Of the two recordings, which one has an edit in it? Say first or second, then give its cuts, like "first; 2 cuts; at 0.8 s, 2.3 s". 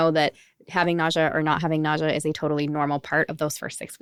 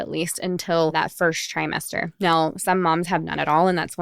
second; 1 cut; at 0.9 s